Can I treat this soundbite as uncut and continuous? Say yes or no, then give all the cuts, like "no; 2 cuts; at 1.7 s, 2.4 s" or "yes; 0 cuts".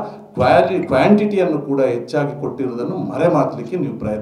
yes; 0 cuts